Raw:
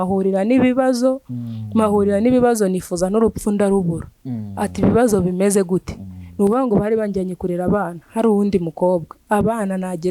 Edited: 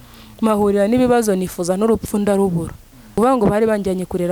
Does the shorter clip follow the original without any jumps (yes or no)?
no